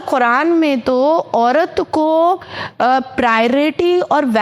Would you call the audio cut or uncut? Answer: uncut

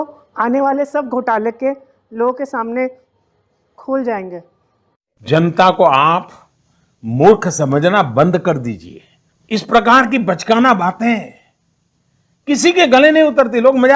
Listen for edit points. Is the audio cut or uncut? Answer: uncut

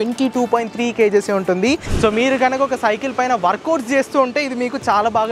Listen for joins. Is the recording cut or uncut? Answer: cut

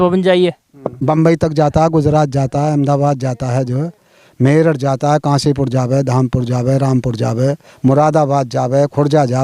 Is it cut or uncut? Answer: cut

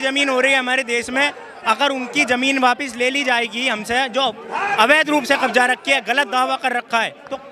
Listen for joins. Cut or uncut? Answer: uncut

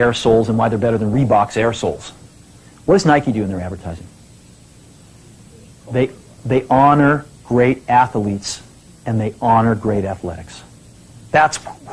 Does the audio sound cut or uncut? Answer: uncut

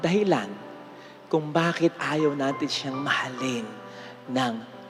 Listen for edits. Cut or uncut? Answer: uncut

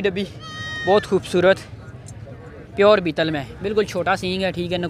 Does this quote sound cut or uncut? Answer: uncut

